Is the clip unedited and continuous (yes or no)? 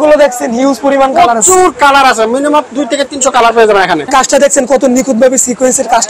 no